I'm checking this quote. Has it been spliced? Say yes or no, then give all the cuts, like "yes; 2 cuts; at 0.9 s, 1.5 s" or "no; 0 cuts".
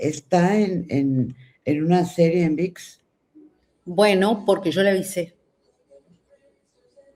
no; 0 cuts